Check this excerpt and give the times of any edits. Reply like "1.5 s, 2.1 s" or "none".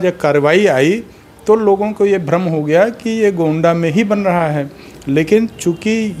none